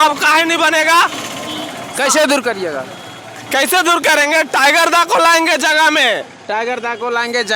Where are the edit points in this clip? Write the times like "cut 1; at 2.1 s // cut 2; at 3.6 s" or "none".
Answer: none

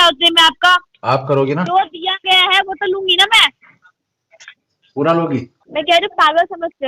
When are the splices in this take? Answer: cut 1; at 1.7 s // cut 2; at 5.6 s

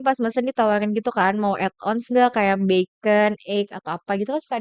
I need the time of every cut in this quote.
none

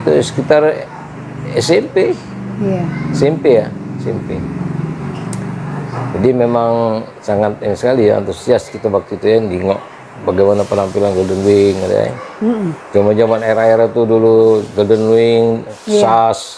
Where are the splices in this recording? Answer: none

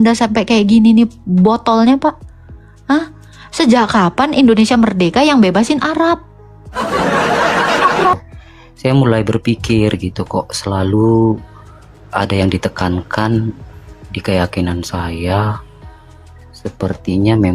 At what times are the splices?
cut 1; at 8.2 s

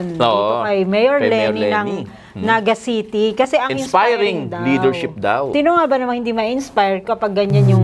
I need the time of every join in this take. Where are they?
none

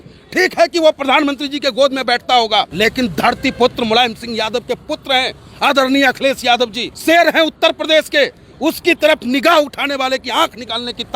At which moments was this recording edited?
cut 1; at 2.7 s // cut 2; at 6.9 s

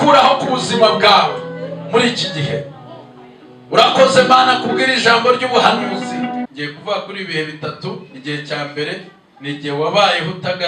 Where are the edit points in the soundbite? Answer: cut 1; at 6.5 s

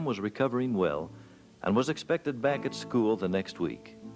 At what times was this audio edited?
cut 1; at 2.4 s

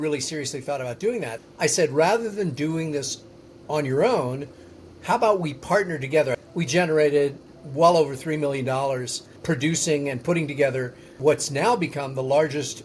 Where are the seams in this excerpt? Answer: cut 1; at 1.4 s // cut 2; at 6.4 s // cut 3; at 7.5 s // cut 4; at 9.3 s // cut 5; at 11.2 s

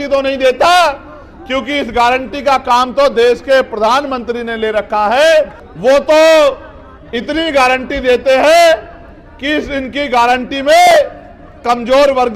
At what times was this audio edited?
cut 1; at 5.6 s

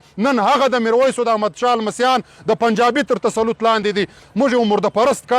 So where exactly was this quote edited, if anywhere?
cut 1; at 4.2 s

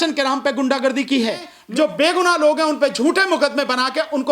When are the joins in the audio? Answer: cut 1; at 1.5 s

